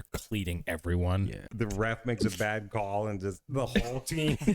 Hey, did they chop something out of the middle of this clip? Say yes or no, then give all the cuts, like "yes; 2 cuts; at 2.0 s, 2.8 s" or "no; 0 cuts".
yes; 1 cut; at 1.4 s